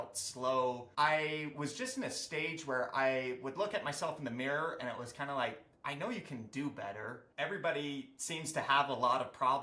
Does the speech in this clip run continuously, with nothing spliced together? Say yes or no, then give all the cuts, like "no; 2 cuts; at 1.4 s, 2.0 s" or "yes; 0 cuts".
no; 2 cuts; at 0.8 s, 7.2 s